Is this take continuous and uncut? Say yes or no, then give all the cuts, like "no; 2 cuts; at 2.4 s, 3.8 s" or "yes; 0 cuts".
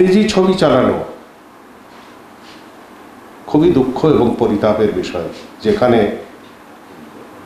yes; 0 cuts